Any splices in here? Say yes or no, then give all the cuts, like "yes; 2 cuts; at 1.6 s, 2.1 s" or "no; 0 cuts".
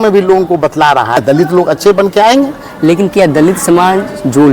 yes; 1 cut; at 1.2 s